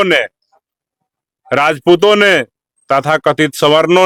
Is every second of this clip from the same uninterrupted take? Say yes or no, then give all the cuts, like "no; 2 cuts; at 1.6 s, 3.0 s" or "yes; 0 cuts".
yes; 0 cuts